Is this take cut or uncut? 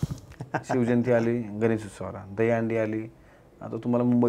uncut